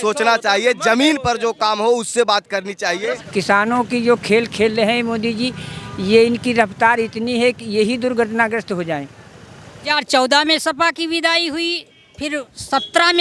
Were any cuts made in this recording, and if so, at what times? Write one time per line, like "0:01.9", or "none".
0:03.2
0:09.9